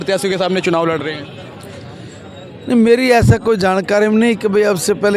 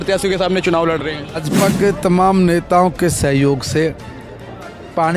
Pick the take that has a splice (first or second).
second